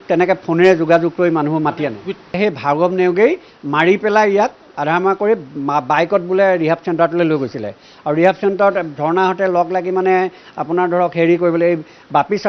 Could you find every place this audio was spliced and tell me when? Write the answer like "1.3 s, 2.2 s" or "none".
2.3 s